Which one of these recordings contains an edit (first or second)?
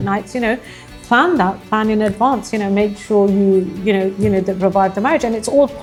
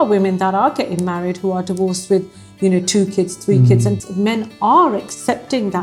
second